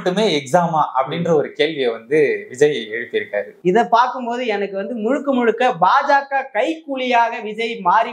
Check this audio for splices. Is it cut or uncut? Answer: cut